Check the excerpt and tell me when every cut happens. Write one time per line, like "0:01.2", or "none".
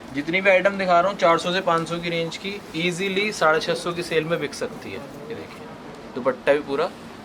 none